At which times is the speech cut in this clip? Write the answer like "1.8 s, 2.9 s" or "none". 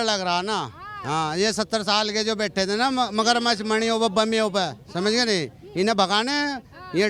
none

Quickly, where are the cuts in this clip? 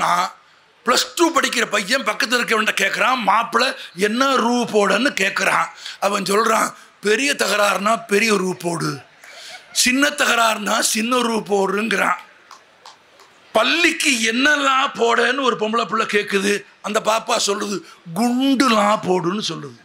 none

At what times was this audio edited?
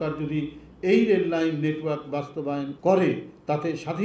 2.7 s

